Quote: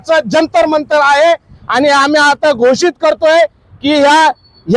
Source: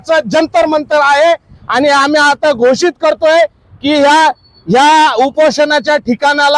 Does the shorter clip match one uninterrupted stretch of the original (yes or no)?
yes